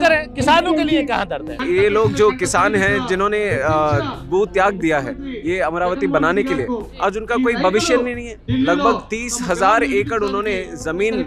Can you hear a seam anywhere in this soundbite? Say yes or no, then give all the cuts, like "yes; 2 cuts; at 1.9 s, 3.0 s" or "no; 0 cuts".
yes; 2 cuts; at 1.6 s, 8.4 s